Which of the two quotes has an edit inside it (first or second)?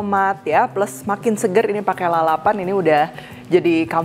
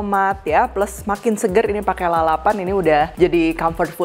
second